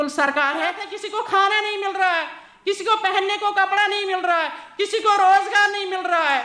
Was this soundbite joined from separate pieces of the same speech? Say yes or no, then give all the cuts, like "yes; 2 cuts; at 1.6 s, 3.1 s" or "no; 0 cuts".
yes; 1 cut; at 0.9 s